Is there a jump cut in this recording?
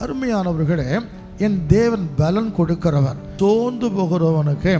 yes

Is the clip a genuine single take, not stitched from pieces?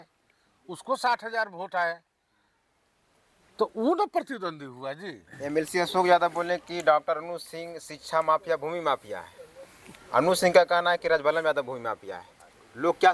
no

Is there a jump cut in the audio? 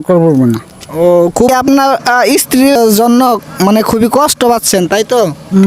yes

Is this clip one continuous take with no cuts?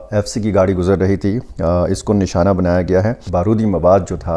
no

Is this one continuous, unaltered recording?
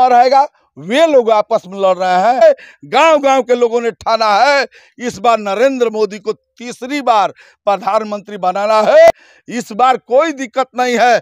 no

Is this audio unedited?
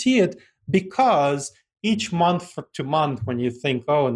yes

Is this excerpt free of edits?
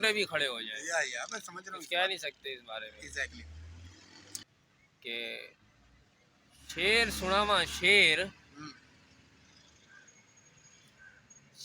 no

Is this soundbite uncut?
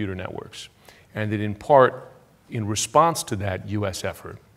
no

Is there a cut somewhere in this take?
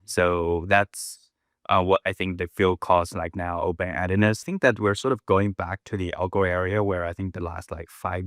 yes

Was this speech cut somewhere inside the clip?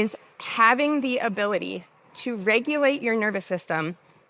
no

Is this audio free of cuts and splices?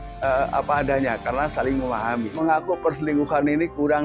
no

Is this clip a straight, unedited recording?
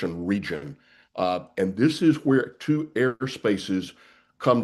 yes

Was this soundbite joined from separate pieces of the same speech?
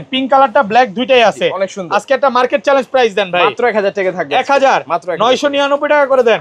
no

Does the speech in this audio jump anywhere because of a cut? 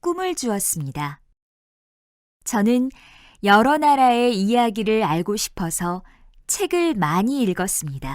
yes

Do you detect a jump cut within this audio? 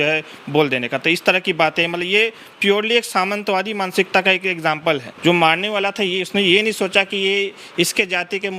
yes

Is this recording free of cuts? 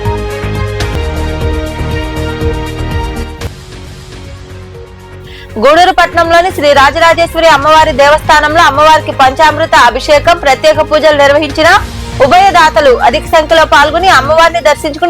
no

